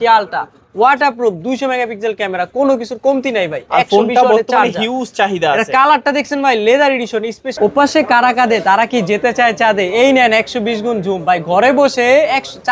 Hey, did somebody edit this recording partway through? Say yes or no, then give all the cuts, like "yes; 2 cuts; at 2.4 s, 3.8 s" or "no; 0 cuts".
yes; 1 cut; at 7.4 s